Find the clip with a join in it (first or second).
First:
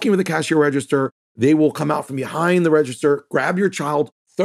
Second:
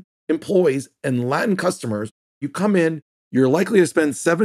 second